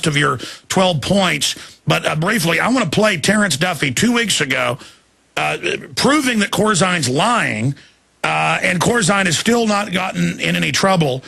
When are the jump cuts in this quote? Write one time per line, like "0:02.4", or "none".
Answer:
0:06.5